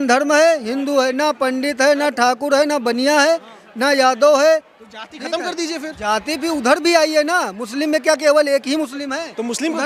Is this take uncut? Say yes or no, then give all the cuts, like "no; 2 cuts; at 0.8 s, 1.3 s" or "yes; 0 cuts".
yes; 0 cuts